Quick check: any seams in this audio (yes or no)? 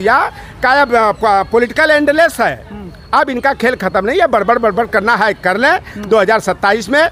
no